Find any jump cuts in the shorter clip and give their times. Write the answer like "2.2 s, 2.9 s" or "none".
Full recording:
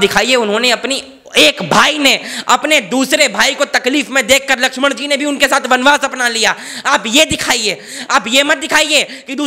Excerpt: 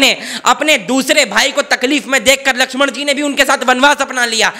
none